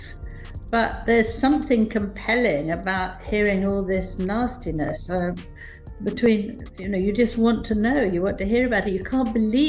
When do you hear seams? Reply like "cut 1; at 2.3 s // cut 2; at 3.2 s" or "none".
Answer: none